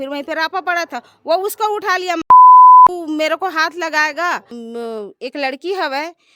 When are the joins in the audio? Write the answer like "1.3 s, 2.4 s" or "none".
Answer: 2.3 s, 2.9 s, 4.6 s